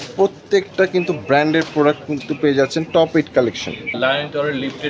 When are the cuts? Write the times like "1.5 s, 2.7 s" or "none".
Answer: 4.0 s